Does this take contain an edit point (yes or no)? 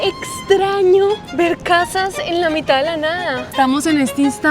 yes